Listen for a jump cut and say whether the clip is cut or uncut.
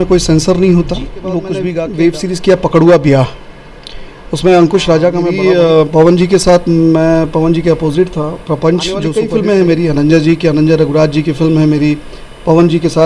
cut